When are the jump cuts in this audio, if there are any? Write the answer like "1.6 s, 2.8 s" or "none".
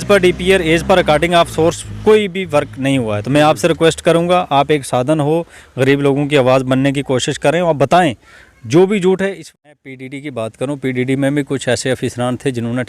9.5 s